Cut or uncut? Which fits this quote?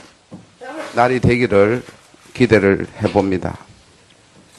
cut